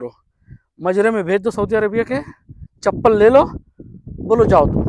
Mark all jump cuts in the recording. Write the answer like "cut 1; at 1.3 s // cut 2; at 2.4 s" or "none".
none